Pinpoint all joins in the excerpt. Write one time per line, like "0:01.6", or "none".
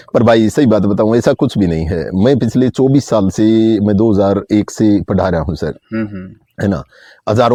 none